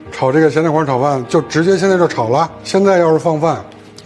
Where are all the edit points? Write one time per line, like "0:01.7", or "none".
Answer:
0:02.6